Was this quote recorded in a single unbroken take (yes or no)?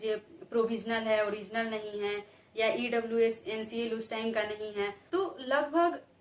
no